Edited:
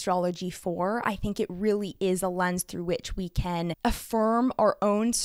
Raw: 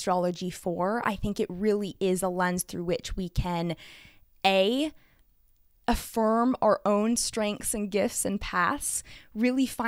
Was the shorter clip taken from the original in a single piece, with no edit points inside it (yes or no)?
no